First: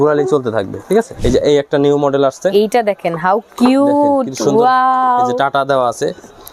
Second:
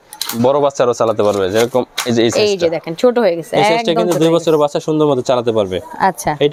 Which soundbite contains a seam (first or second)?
first